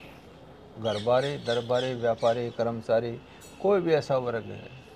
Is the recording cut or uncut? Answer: uncut